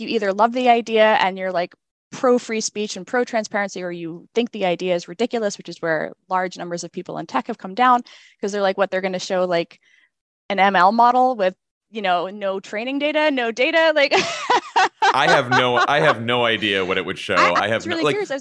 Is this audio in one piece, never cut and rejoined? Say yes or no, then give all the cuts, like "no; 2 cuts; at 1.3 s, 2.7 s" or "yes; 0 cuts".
yes; 0 cuts